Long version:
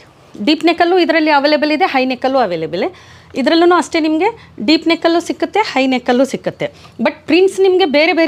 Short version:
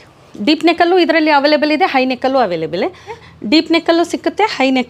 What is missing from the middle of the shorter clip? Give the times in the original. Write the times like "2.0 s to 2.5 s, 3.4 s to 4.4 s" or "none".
3.3 s to 4.4 s